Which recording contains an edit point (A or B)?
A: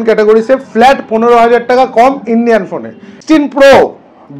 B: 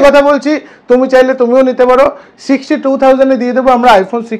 A